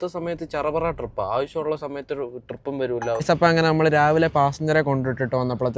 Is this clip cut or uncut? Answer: cut